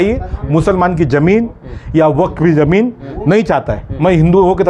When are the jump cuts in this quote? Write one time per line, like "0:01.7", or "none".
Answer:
none